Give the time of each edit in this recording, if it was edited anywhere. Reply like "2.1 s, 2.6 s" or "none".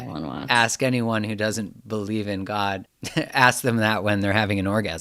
3.0 s